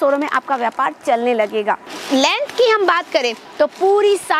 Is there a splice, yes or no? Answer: yes